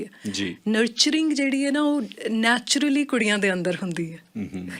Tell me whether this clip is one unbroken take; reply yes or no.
yes